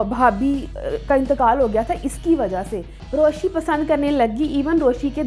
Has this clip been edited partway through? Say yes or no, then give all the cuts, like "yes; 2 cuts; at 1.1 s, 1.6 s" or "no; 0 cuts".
yes; 1 cut; at 3.0 s